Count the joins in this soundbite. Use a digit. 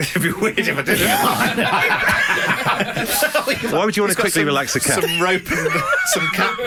0